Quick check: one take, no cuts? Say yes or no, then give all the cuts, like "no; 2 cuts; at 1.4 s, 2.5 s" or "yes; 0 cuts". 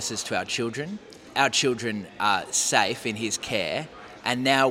no; 1 cut; at 1.3 s